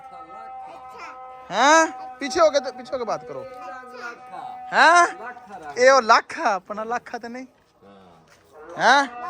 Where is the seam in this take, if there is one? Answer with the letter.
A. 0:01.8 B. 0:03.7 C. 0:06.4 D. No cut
D